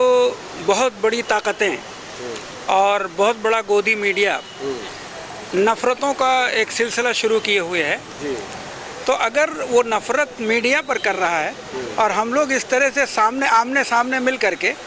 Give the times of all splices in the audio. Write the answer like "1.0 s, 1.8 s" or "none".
none